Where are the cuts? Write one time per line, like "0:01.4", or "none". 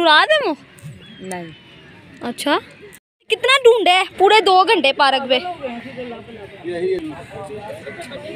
0:03.3